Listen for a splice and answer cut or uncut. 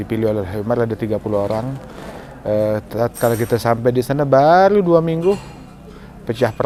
uncut